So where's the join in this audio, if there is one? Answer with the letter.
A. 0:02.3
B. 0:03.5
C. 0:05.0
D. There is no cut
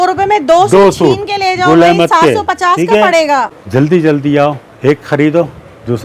B